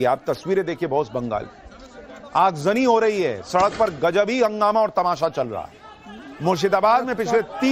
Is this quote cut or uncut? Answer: cut